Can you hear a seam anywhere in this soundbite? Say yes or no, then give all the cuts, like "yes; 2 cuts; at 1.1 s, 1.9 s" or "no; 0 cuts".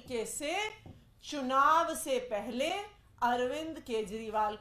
no; 0 cuts